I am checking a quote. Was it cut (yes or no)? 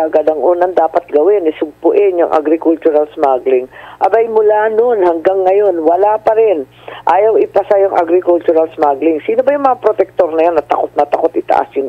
no